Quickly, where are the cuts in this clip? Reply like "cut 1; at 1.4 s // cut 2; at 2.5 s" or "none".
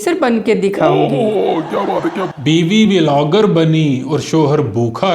cut 1; at 2.2 s